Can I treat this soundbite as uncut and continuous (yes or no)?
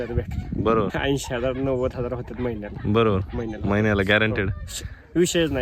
no